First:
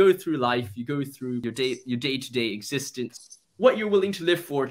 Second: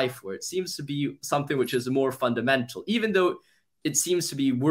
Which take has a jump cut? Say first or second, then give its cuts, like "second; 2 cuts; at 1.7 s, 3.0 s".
first; 2 cuts; at 1.4 s, 3.2 s